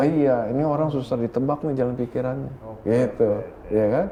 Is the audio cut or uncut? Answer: uncut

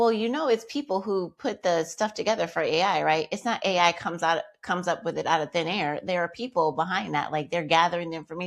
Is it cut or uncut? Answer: uncut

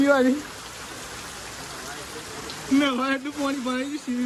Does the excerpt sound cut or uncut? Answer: uncut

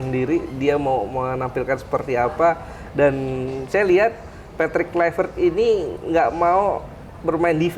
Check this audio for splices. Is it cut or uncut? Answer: uncut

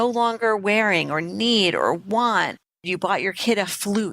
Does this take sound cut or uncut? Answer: cut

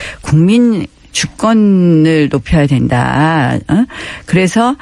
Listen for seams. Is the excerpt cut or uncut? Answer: uncut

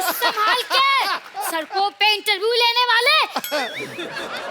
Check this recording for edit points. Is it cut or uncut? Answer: cut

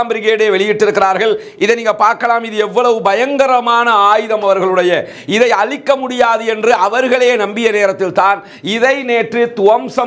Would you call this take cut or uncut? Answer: uncut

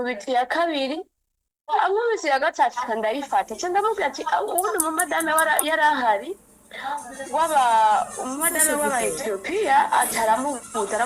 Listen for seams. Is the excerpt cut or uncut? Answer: uncut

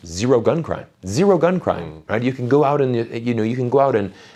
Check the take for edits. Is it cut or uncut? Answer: uncut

